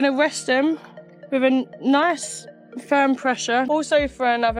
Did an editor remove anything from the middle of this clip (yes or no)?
yes